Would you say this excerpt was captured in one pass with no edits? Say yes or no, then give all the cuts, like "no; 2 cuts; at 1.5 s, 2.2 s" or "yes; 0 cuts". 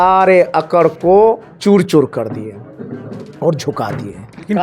no; 1 cut; at 1.5 s